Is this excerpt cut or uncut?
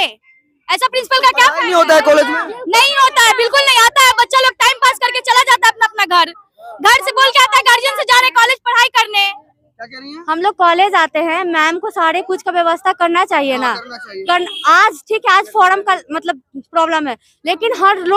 uncut